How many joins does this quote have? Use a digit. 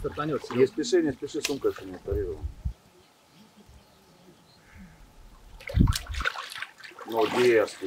0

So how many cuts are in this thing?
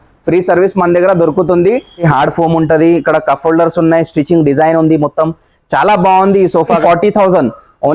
2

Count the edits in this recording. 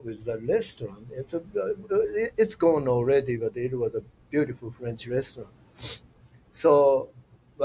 0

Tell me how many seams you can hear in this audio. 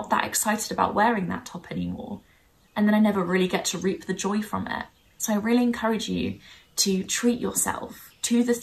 0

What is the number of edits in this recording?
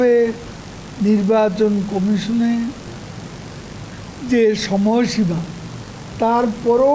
0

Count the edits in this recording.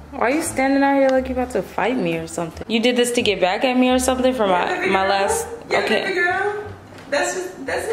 1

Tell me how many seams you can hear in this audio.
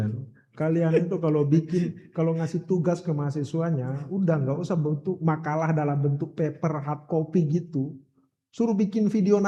0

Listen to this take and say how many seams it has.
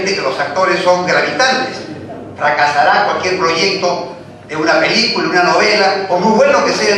0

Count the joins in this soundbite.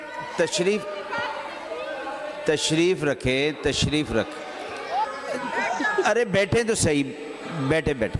1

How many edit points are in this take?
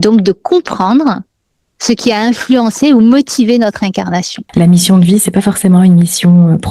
1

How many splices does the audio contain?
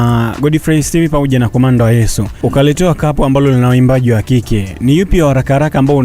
1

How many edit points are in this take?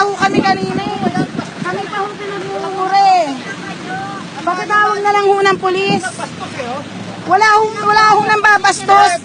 0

